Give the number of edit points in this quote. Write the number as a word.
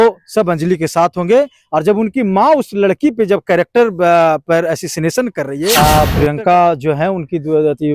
one